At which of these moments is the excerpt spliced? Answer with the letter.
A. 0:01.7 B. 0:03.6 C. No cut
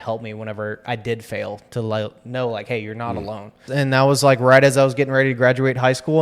B